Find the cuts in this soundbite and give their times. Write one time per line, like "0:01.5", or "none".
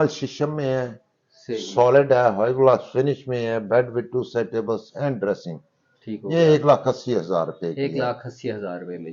none